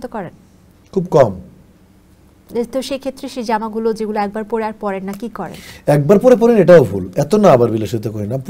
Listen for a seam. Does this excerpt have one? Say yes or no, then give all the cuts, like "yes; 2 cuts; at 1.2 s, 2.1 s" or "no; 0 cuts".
no; 0 cuts